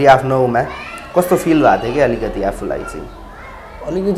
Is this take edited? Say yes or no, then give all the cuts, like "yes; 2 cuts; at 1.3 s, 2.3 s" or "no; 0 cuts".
no; 0 cuts